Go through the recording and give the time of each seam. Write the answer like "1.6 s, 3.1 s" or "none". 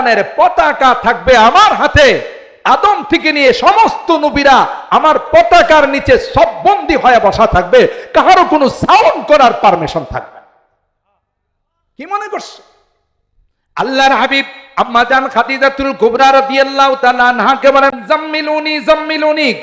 18.0 s